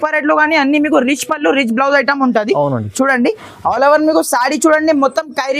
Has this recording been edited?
no; 0 cuts

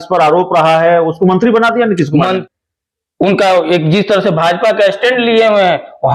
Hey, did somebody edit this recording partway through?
yes; 1 cut; at 2.4 s

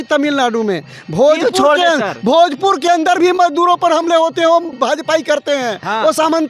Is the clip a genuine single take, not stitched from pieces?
no; 1 cut; at 4.7 s

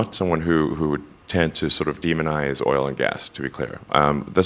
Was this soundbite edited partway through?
no; 0 cuts

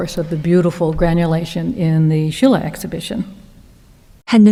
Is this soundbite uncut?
yes; 0 cuts

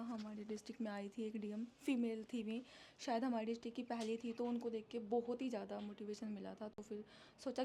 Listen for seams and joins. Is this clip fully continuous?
yes; 0 cuts

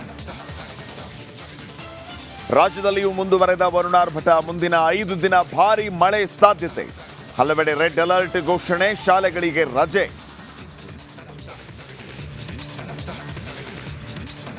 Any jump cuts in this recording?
yes; 2 cuts; at 12.1 s, 13.3 s

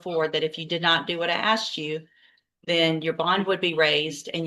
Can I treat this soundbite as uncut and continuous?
yes; 0 cuts

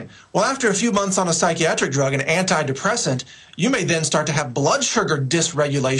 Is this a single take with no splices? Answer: yes; 0 cuts

